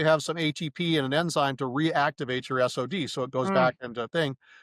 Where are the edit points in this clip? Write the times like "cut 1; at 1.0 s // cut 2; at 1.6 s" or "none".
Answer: none